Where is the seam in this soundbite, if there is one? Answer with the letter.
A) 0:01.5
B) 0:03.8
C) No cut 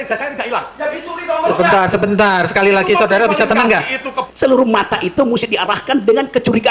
B